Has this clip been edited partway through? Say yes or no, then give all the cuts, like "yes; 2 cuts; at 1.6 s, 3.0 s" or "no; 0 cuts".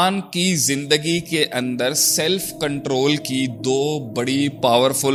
no; 0 cuts